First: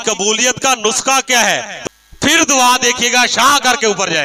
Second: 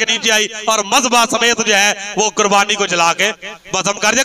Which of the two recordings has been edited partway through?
first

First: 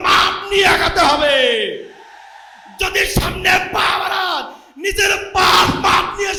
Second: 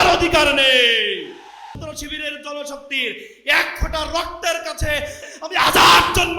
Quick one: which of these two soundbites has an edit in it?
second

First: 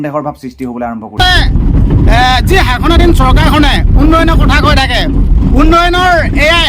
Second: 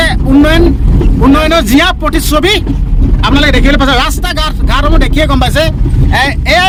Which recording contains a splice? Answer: first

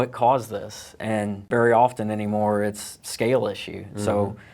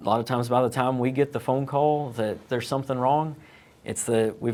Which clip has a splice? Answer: first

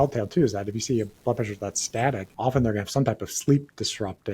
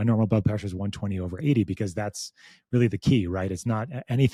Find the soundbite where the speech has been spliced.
first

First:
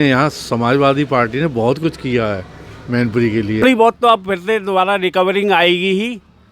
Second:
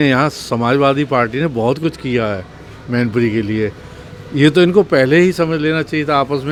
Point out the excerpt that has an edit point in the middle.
first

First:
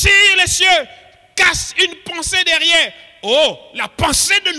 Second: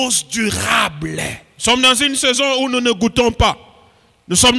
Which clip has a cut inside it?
second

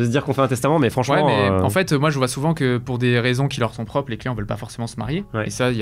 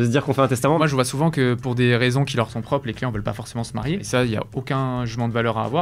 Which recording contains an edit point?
second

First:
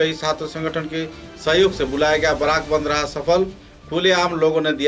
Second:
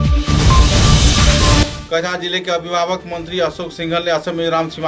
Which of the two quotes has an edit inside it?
second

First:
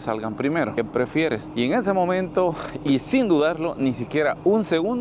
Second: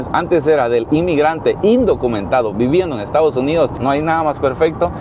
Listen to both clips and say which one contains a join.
second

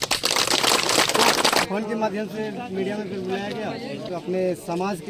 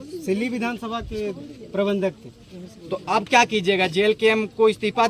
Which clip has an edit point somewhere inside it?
first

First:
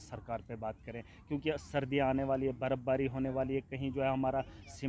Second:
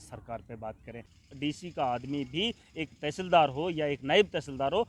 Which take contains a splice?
second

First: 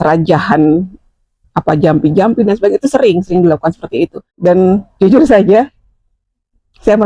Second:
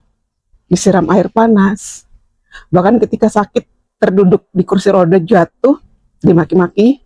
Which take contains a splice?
first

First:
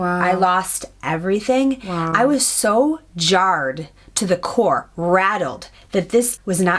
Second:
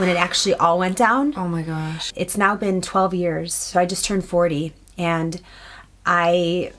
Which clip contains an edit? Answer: second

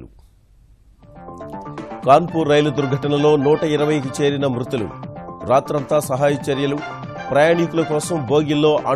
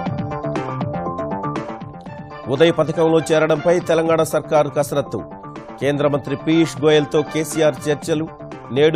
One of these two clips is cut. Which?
second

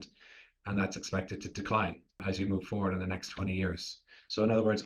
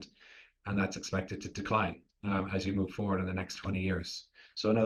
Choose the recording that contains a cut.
first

